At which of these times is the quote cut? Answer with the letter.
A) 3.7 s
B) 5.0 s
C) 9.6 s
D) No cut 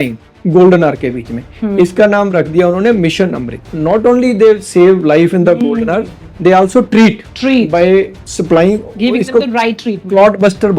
A